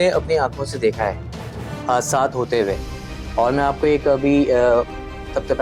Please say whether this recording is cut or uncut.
uncut